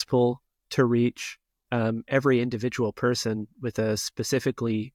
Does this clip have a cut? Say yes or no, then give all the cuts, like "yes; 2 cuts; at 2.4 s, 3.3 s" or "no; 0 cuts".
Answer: no; 0 cuts